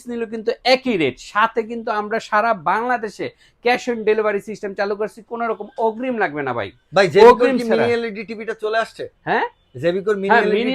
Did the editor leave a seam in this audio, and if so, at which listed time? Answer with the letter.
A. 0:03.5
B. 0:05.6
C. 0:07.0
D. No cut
D